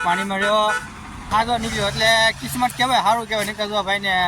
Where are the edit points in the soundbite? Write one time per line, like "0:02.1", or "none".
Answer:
0:01.2